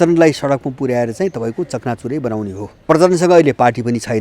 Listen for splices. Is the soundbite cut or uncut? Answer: cut